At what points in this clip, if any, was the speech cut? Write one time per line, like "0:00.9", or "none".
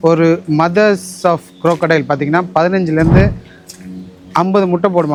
none